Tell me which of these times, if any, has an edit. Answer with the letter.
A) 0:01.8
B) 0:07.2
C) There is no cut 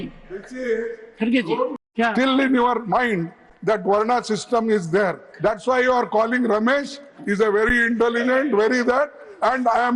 A